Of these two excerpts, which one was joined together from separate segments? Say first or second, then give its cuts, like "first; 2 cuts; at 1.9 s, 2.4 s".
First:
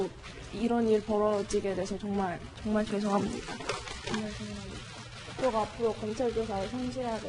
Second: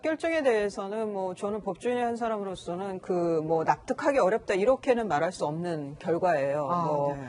second; 1 cut; at 5.7 s